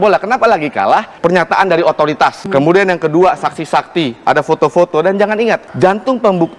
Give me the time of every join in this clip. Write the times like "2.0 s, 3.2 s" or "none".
1.1 s, 2.4 s, 5.7 s